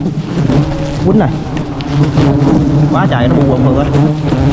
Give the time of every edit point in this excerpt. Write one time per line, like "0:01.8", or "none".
none